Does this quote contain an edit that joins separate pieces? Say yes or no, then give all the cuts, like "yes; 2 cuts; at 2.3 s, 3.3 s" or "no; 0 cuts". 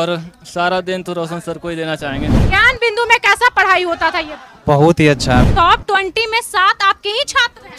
yes; 2 cuts; at 2.4 s, 5.4 s